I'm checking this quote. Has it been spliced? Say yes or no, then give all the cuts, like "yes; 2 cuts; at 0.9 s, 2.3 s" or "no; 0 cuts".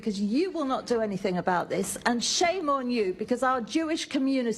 no; 0 cuts